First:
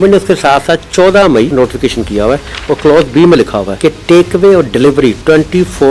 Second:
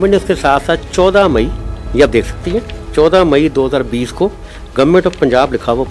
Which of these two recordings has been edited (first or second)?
first